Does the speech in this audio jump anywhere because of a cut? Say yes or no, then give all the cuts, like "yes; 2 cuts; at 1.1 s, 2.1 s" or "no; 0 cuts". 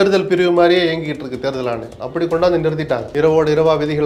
yes; 1 cut; at 3.1 s